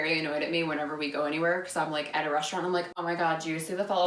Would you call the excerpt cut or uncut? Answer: uncut